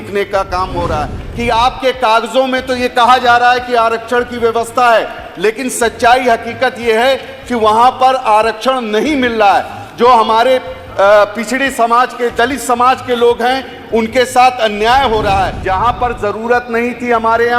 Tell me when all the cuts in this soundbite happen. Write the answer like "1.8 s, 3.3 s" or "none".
1.2 s, 15.6 s